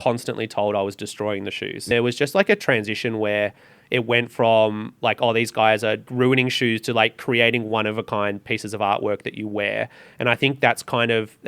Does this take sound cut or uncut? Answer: cut